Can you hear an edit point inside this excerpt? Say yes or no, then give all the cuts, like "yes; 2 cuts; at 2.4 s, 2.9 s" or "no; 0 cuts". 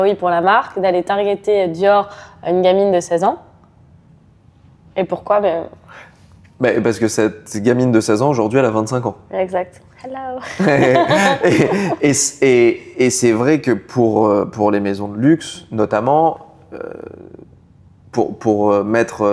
no; 0 cuts